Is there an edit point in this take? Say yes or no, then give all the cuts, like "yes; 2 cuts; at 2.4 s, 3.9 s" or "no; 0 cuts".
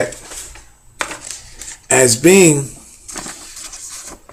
no; 0 cuts